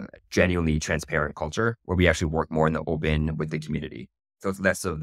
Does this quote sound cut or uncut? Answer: uncut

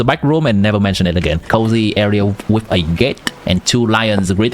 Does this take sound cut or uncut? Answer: cut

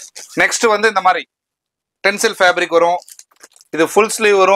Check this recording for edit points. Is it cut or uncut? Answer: uncut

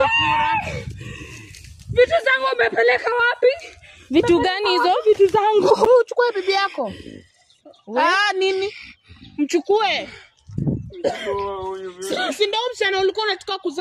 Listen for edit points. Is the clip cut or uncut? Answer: cut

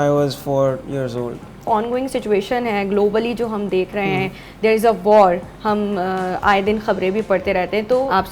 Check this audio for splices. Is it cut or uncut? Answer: cut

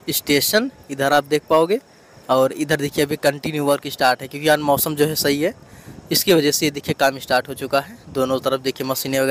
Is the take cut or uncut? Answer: uncut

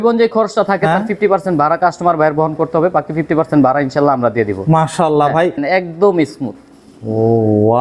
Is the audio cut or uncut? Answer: cut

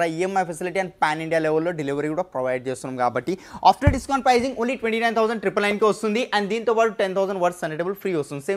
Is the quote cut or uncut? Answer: uncut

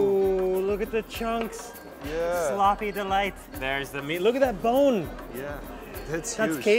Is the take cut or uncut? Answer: cut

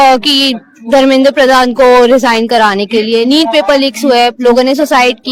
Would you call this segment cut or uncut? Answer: uncut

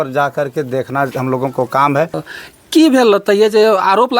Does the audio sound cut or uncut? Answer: cut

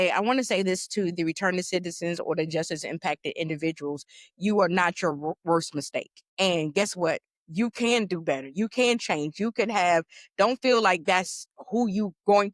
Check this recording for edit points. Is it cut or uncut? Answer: cut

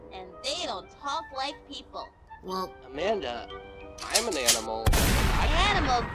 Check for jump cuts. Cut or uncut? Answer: uncut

